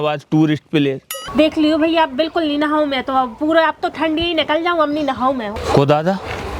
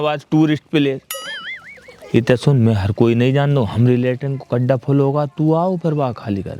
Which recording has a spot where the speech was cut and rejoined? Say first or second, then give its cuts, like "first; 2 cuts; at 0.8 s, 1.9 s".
first; 2 cuts; at 1.1 s, 5.5 s